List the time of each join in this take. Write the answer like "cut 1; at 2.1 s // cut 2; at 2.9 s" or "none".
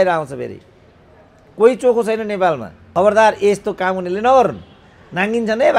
cut 1; at 2.7 s